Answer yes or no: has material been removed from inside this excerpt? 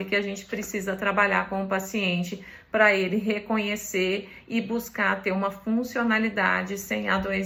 no